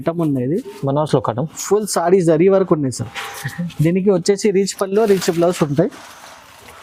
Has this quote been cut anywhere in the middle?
no; 0 cuts

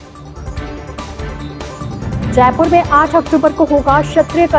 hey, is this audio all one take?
no; 1 cut; at 1.5 s

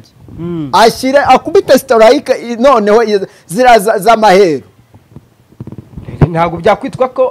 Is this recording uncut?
yes; 0 cuts

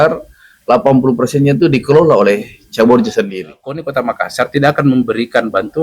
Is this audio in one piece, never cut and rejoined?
no; 1 cut; at 3.8 s

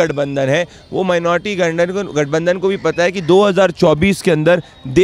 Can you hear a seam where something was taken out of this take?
no; 0 cuts

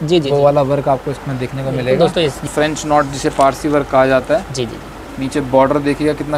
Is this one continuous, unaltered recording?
no; 1 cut; at 2.5 s

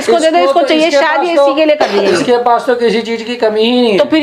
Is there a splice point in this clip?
no; 0 cuts

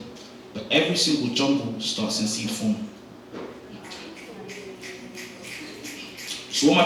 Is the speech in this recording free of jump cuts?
yes; 0 cuts

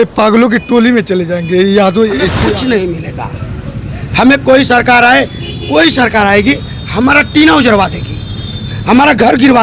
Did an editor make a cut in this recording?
yes; 1 cut; at 2.4 s

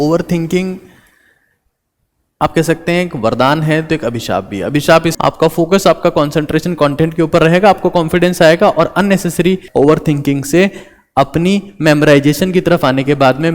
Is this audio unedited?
no; 2 cuts; at 5.1 s, 9.6 s

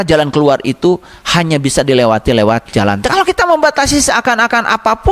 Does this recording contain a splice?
yes; 1 cut; at 3.0 s

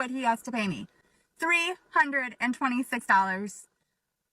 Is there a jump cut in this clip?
no; 0 cuts

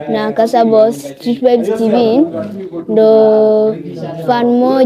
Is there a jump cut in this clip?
no; 0 cuts

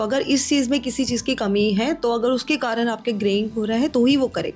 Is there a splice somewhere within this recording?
no; 0 cuts

